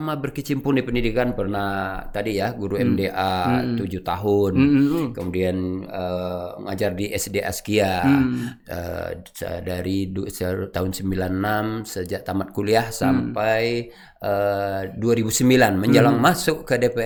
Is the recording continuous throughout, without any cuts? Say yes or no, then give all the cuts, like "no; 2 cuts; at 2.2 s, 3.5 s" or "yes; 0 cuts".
yes; 0 cuts